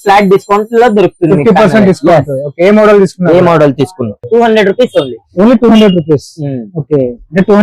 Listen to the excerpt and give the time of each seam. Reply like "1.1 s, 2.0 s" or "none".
4.2 s